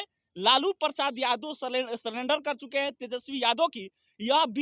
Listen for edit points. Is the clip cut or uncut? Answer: uncut